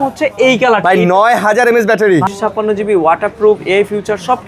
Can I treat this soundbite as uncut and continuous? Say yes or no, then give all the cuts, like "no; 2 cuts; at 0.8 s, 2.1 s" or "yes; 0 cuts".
no; 1 cut; at 2.3 s